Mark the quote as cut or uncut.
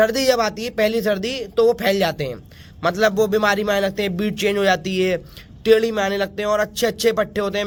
uncut